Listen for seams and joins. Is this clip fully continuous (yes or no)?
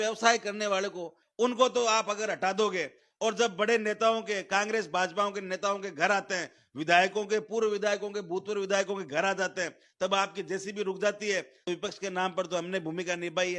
no